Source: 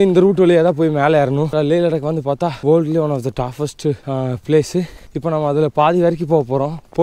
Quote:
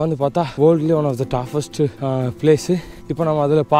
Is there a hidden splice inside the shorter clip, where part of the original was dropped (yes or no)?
no